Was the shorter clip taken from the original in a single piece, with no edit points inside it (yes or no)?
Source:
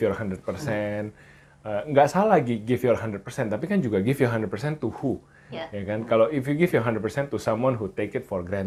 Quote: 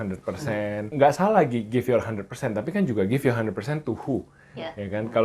no